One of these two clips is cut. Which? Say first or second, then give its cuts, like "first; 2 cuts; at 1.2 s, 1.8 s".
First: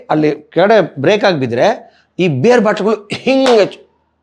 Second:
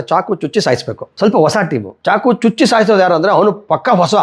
second; 2 cuts; at 1.0 s, 1.9 s